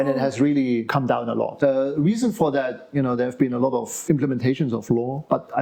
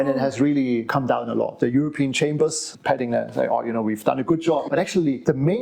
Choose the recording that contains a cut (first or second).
second